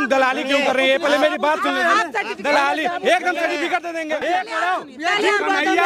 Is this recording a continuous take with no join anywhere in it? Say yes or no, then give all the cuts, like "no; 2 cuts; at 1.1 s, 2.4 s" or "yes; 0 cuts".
no; 1 cut; at 4.2 s